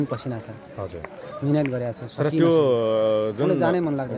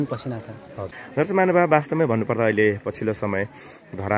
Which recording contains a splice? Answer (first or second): second